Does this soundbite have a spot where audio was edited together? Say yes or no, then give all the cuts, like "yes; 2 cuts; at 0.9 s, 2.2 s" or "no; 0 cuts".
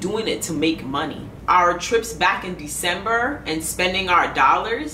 yes; 1 cut; at 1.3 s